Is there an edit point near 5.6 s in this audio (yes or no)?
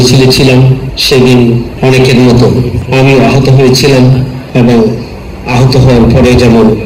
no